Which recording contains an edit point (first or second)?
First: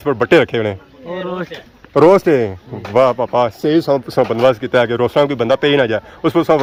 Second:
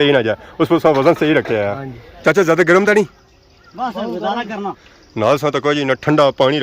second